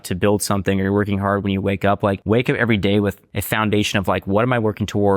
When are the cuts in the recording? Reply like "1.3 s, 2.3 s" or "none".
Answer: 2.2 s, 3.3 s